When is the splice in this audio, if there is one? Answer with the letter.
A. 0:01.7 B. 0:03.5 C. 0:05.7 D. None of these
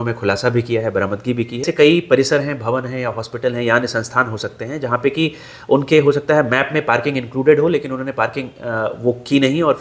A